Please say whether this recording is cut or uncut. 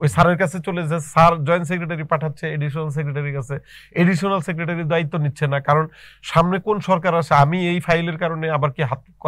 uncut